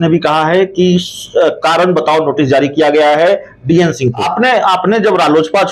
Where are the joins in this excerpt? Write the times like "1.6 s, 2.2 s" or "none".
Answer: 4.2 s